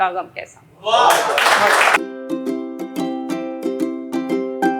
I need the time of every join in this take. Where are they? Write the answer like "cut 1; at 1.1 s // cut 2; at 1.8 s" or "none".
cut 1; at 2.0 s